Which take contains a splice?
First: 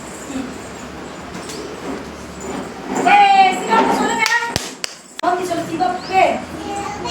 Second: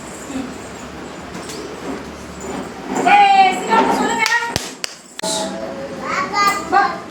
first; 1 cut; at 5.2 s

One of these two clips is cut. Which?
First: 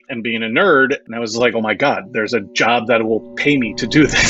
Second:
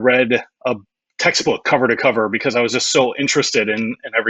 first; 1 cut; at 1.1 s

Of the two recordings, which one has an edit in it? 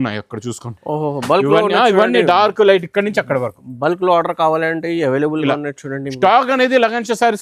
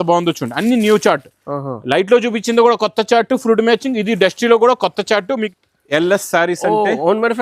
second; 1 cut; at 5.5 s

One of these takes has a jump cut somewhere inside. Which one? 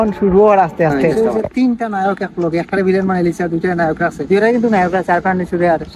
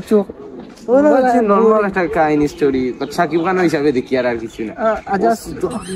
first; 2 cuts; at 1.0 s, 4.2 s

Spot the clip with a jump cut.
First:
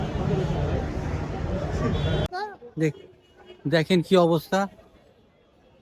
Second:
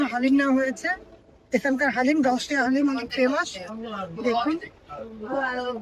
first; 1 cut; at 2.3 s

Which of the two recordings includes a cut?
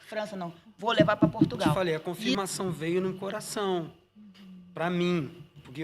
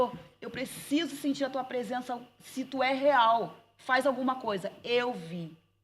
first; 1 cut; at 2.1 s

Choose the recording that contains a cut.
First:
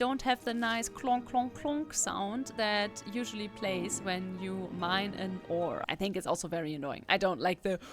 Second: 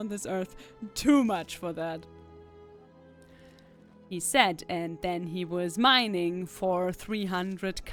first; 1 cut; at 5.8 s

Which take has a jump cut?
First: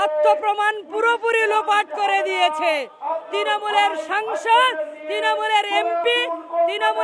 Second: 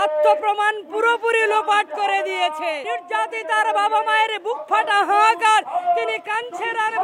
second; 1 cut; at 2.9 s

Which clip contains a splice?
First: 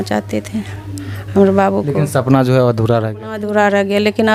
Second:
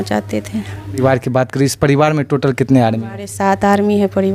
second; 1 cut; at 1.0 s

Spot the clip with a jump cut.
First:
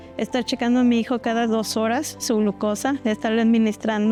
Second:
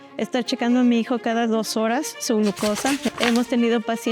second; 1 cut; at 3.0 s

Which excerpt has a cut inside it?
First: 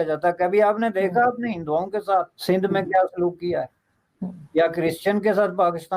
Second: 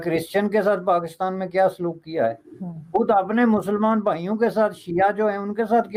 first; 1 cut; at 2.3 s

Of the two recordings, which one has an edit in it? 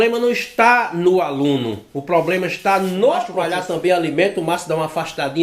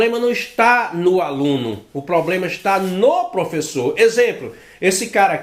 first; 1 cut; at 3.4 s

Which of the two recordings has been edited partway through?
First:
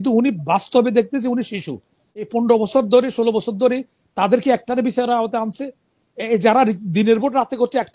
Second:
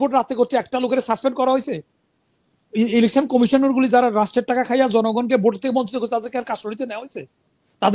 first; 1 cut; at 2.3 s

